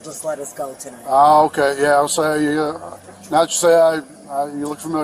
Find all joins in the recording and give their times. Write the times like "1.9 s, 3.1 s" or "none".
4.0 s